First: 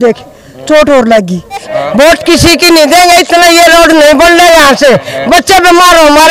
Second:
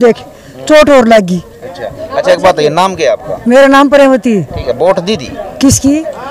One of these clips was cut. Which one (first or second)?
first